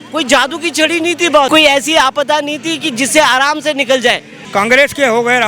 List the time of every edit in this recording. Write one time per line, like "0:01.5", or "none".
0:01.5
0:04.3